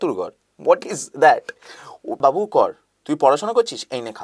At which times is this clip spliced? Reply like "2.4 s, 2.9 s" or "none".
2.2 s